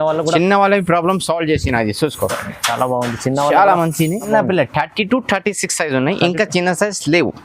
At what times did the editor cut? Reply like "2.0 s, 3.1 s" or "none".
4.3 s